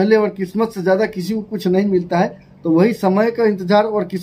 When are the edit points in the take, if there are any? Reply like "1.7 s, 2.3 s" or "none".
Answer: none